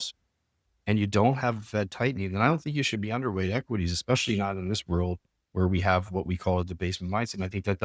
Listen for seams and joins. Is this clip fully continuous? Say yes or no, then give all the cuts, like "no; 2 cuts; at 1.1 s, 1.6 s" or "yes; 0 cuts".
yes; 0 cuts